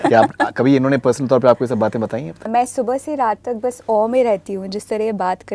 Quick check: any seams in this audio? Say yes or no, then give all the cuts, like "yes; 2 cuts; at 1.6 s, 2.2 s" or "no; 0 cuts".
yes; 1 cut; at 2.5 s